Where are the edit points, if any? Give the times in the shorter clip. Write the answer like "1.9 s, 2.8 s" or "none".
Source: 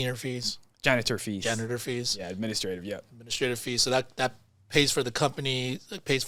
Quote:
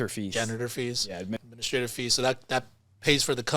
1.4 s